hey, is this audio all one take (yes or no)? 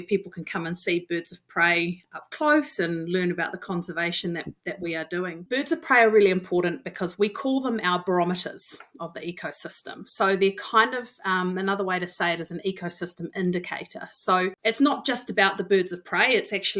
no